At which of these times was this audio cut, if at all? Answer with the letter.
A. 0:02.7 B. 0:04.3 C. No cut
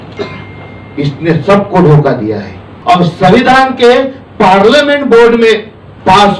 A